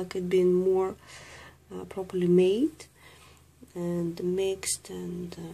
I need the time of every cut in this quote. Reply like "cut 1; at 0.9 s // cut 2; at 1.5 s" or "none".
cut 1; at 2.8 s

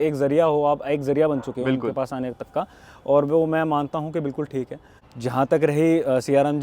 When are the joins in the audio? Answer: cut 1; at 5.0 s

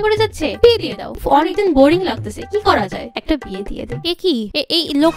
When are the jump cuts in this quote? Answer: cut 1; at 3.9 s

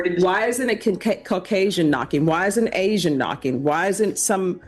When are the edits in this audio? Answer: none

